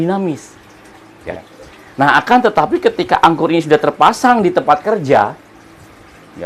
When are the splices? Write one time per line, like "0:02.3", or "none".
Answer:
0:01.4